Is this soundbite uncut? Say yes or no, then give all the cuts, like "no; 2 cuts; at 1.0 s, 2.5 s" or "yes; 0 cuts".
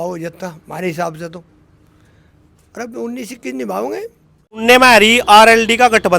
no; 1 cut; at 4.6 s